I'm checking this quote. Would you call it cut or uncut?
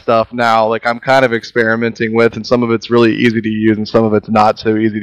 uncut